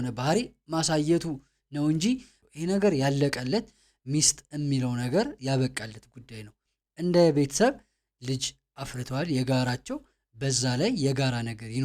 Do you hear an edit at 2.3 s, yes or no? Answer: yes